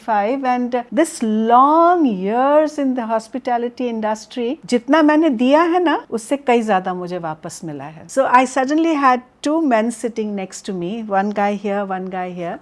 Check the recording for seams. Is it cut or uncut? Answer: cut